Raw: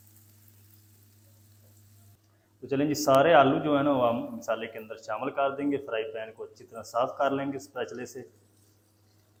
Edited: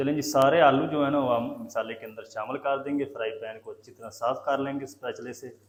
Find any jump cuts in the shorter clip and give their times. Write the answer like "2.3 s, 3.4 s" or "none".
none